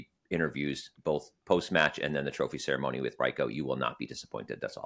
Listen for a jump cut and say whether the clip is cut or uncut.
uncut